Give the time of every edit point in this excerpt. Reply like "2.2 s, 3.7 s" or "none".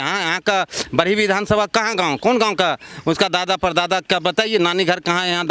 none